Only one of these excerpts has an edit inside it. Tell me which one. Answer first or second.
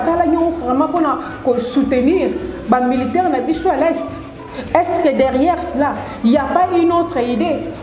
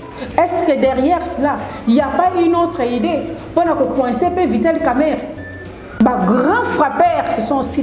second